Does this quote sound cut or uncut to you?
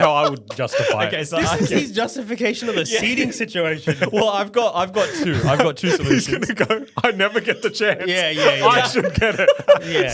uncut